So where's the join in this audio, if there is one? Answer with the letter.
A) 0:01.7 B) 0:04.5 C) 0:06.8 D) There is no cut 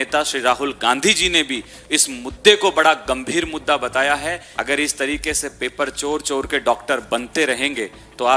B